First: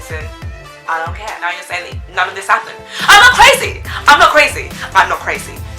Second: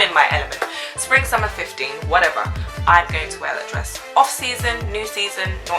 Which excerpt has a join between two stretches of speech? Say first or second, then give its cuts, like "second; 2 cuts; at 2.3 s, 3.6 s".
first; 1 cut; at 1.4 s